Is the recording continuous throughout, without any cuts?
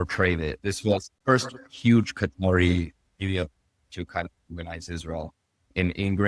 no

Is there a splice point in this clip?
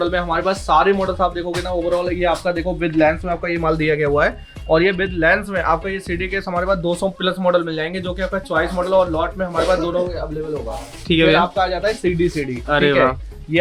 no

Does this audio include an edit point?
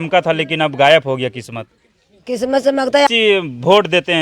yes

